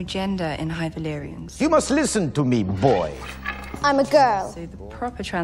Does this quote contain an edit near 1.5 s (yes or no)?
no